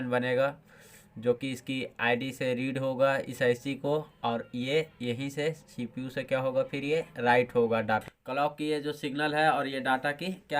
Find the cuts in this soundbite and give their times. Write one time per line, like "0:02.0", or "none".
0:08.0